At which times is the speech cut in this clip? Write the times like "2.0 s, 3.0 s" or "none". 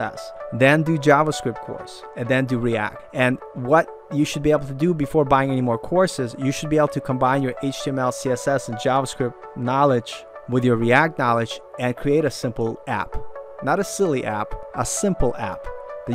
3.0 s, 12.8 s, 14.6 s